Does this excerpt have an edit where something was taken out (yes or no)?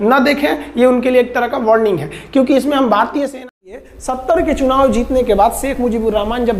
yes